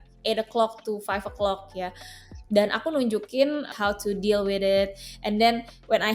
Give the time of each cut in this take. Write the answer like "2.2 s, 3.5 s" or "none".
3.7 s